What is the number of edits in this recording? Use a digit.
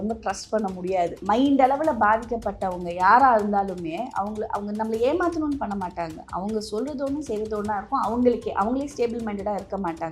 1